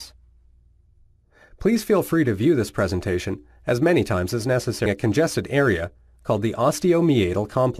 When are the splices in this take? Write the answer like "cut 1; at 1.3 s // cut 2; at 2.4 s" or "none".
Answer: none